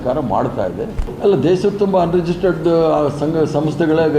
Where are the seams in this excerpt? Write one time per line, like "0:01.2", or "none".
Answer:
0:01.1